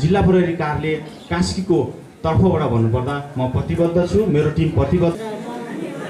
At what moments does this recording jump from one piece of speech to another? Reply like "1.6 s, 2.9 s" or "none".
5.1 s

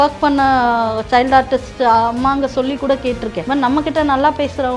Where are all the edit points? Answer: 3.4 s

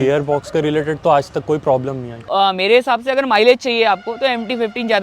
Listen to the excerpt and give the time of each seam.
2.3 s

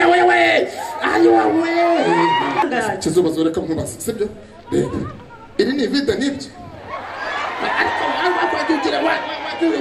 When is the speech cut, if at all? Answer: 2.6 s

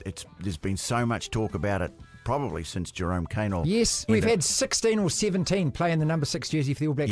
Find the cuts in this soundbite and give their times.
4.1 s

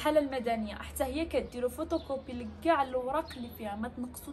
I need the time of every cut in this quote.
none

